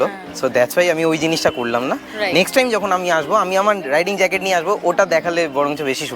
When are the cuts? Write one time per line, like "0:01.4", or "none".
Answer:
none